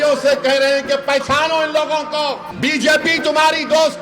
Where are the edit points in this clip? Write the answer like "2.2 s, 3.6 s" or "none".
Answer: 2.5 s